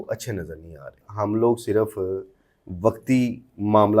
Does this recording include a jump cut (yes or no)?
yes